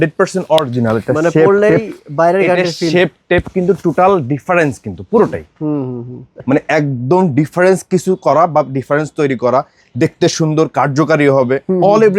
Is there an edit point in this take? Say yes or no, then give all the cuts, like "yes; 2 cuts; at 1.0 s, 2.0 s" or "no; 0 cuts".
yes; 1 cut; at 6.2 s